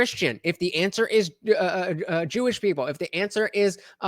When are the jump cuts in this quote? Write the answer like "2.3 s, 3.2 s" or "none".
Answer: none